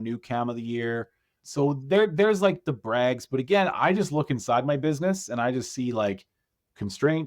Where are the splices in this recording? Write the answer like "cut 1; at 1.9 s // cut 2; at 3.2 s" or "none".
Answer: cut 1; at 1.4 s